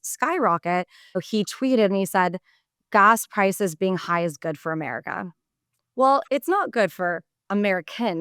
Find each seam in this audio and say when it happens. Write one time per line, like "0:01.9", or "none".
0:01.2
0:02.7